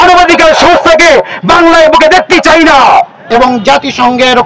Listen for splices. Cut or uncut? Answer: cut